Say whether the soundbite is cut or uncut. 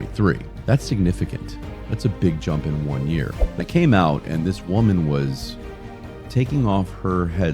cut